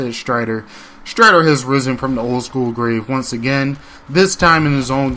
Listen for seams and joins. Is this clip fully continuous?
yes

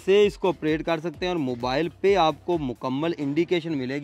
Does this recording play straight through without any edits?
yes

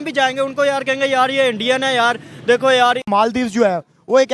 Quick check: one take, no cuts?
no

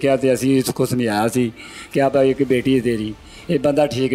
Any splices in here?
no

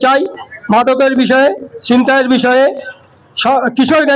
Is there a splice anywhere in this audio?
no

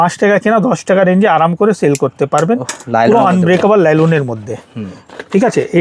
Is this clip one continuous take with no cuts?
yes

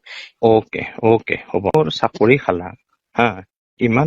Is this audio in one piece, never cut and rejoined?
no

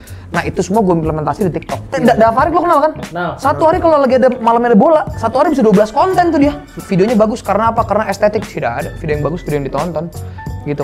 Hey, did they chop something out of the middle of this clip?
yes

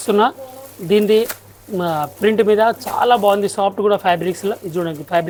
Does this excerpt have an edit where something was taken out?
no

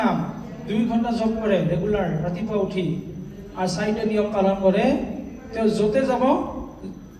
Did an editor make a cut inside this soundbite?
no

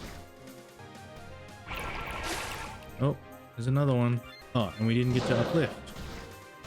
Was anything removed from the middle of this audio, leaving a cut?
yes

